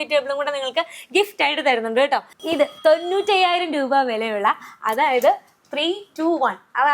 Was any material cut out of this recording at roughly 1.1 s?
no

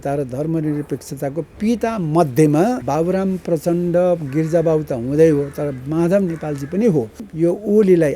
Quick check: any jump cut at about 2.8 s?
yes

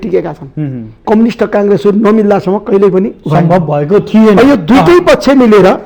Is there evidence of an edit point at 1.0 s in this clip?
yes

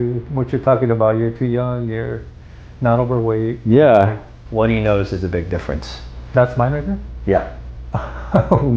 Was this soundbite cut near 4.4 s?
yes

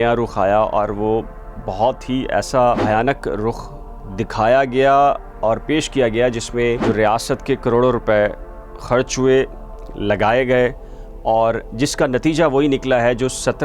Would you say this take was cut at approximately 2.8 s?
yes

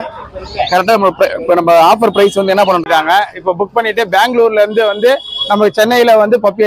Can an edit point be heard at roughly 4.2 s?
no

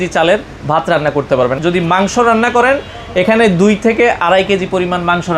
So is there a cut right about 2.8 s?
no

